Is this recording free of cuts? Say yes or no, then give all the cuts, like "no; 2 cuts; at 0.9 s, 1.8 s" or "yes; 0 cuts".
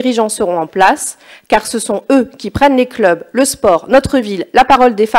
yes; 0 cuts